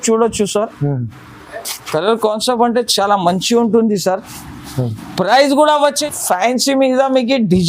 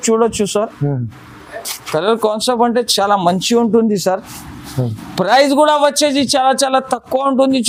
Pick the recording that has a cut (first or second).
first